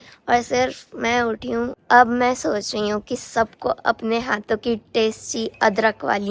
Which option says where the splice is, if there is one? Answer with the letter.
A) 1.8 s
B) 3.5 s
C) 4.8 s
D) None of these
A